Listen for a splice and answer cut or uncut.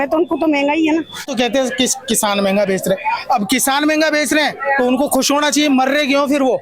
cut